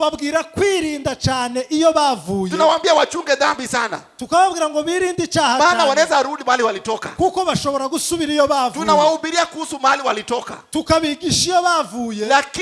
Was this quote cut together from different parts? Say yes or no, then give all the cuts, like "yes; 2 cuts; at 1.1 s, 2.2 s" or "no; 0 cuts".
no; 0 cuts